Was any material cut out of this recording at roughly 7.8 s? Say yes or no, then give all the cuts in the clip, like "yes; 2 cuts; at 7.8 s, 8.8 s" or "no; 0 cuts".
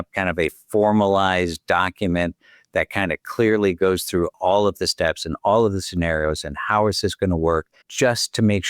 yes; 1 cut; at 7.8 s